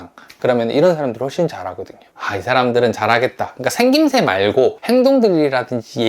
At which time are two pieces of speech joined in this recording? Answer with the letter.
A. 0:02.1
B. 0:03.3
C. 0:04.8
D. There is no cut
A